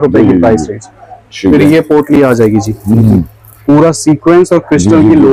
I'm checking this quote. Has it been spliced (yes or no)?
no